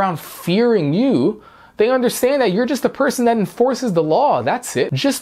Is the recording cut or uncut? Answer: uncut